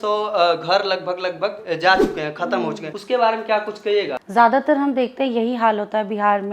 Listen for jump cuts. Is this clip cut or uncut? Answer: cut